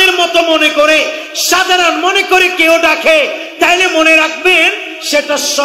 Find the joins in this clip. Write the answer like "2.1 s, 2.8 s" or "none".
none